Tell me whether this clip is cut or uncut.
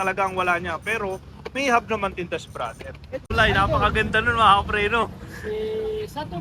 cut